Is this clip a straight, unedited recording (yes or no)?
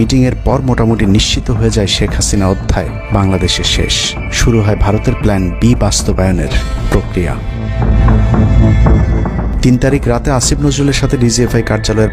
yes